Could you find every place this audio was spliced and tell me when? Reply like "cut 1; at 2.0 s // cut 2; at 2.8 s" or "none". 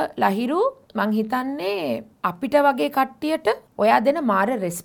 cut 1; at 0.8 s // cut 2; at 2.1 s // cut 3; at 3.7 s